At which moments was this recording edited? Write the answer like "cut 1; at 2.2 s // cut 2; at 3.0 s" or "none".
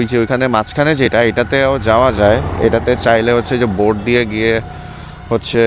none